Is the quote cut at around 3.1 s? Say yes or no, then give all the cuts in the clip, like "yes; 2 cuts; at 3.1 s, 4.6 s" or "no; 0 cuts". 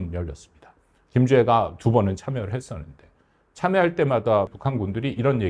no; 1 cut; at 4.5 s